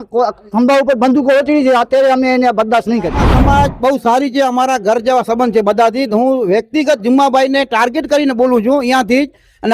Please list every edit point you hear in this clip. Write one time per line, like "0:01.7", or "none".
0:03.3